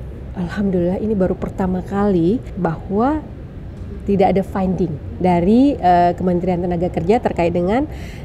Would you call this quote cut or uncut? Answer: cut